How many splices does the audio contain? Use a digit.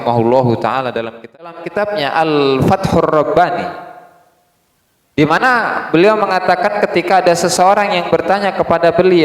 1